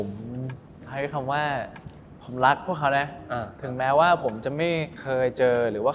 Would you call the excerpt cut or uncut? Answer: uncut